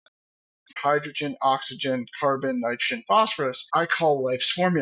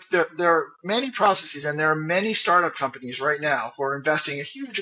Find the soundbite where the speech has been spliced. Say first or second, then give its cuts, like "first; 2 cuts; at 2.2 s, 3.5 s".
first; 2 cuts; at 0.8 s, 3.7 s